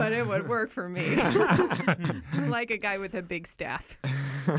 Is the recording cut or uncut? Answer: uncut